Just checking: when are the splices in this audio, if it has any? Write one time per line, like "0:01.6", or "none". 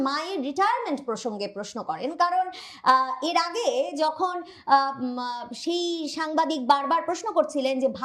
none